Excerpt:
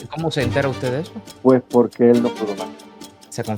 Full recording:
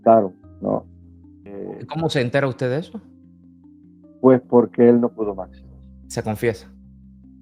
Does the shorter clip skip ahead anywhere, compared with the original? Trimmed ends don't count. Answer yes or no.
yes